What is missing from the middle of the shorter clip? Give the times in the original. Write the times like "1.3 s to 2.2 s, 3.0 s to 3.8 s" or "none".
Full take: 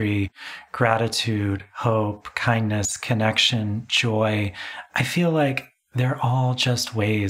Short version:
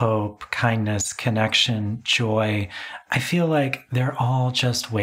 5.7 s to 5.9 s